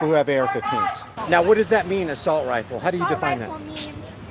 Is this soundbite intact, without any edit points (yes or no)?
no